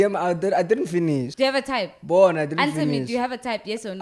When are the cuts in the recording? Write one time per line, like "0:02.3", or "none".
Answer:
0:01.3

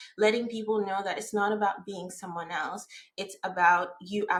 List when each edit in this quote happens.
none

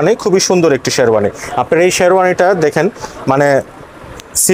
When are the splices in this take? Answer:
none

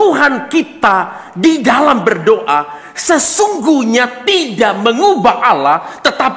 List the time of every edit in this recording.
none

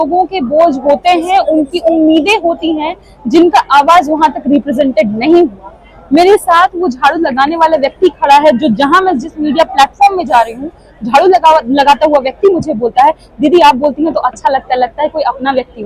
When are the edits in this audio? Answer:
none

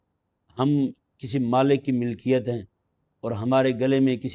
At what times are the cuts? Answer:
none

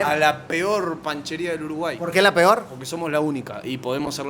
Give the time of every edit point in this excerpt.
none

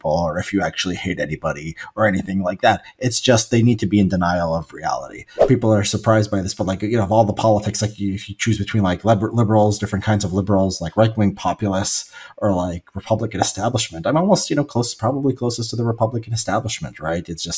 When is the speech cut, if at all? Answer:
0:05.3

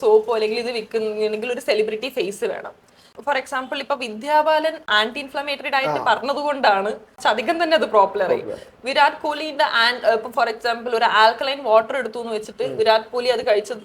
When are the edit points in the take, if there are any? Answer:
0:03.2
0:04.9
0:07.1

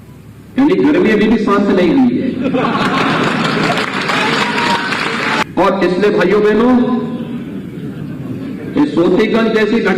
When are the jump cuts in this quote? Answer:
0:05.4

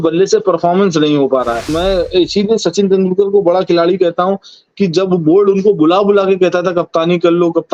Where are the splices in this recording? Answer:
0:01.7

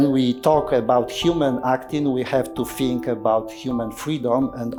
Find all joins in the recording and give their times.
none

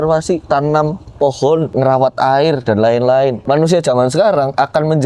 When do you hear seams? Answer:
0:01.7
0:03.4

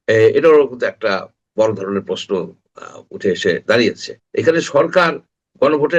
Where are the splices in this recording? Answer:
0:04.1

